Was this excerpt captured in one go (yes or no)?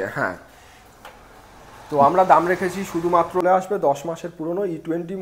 no